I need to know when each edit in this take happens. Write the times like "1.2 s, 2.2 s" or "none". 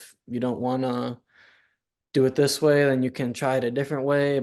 none

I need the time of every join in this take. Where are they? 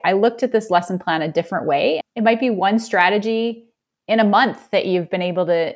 2.1 s

